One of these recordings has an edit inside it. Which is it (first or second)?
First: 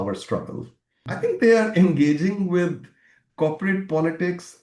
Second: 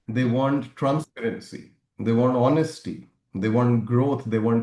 first